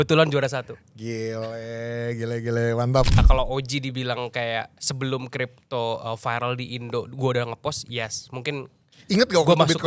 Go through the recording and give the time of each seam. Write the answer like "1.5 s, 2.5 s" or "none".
3.2 s